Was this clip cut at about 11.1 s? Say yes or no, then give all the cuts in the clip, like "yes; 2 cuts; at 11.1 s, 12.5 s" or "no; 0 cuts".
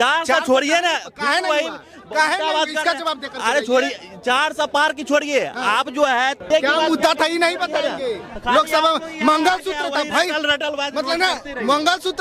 no; 1 cut; at 6.4 s